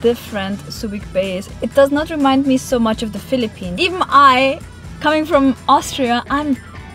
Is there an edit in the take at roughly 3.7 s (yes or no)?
yes